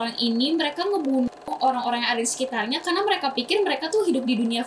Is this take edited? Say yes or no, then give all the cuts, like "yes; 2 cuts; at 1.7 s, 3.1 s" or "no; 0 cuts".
no; 0 cuts